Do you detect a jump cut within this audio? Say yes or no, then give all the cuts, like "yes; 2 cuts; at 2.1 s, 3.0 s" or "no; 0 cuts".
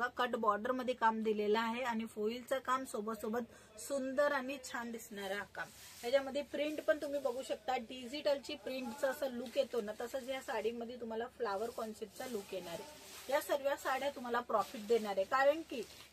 no; 0 cuts